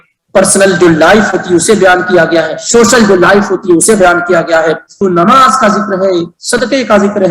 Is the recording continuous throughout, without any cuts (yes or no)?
no